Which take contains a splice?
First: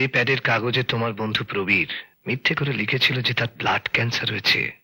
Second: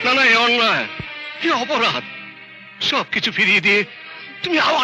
first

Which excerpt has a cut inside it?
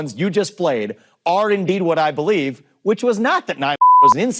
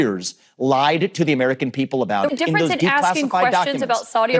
second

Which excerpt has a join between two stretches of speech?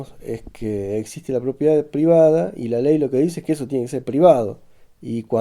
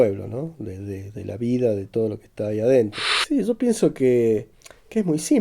second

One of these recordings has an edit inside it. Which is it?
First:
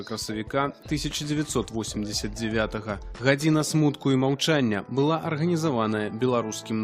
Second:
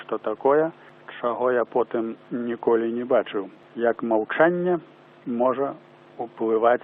second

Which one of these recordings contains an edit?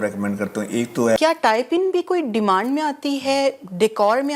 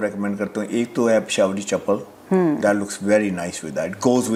first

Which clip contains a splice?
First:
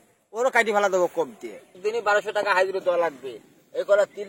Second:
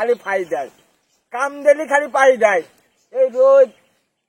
first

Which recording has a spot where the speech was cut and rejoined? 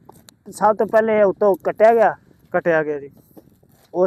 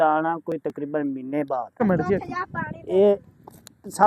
second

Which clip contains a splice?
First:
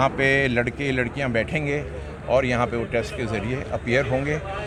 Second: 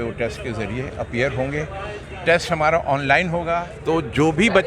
second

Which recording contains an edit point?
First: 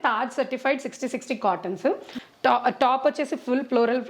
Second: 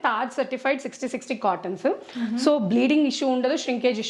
first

